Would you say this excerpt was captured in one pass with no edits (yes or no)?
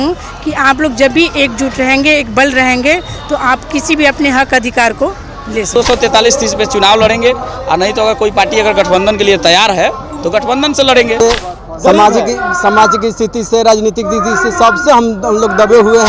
no